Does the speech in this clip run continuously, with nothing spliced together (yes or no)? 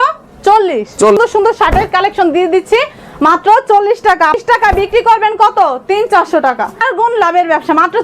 no